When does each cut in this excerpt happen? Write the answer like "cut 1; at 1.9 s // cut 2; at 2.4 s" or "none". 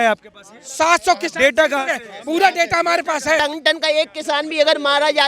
cut 1; at 3.4 s